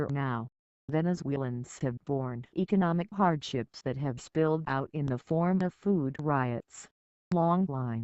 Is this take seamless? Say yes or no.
no